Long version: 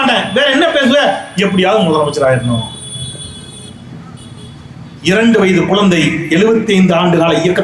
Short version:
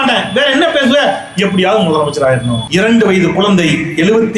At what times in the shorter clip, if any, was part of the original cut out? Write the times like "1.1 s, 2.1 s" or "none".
2.6 s